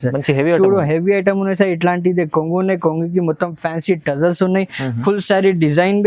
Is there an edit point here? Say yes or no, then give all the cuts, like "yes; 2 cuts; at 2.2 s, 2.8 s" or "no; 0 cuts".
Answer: no; 0 cuts